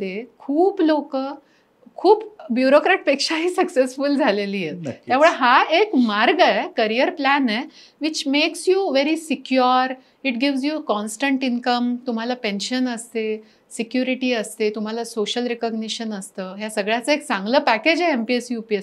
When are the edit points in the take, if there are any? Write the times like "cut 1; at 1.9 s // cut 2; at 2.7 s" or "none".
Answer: none

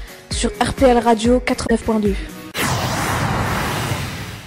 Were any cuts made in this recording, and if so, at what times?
cut 1; at 1.7 s

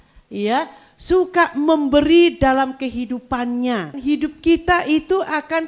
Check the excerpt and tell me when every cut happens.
cut 1; at 4.0 s

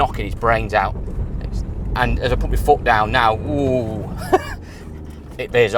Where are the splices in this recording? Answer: none

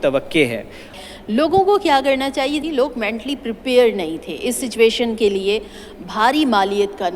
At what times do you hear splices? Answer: cut 1; at 1.0 s // cut 2; at 2.6 s

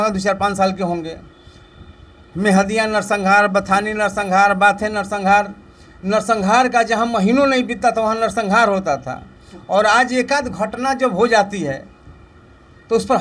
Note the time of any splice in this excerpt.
none

